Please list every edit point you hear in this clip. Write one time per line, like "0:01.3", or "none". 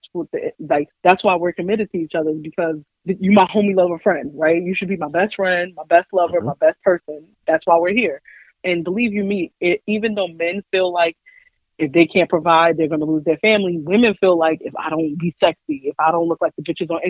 0:00.9
0:02.9
0:08.6